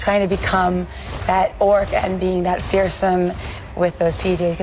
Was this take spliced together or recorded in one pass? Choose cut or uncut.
uncut